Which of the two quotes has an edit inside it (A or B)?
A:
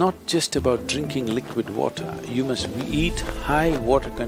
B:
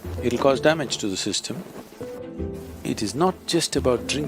B